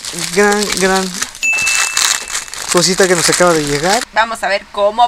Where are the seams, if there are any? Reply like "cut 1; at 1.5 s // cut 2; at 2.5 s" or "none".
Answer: cut 1; at 4.1 s